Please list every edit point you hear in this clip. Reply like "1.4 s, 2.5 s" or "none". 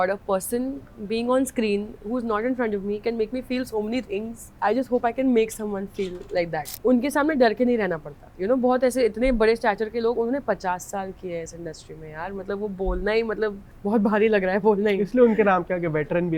4.4 s, 6.6 s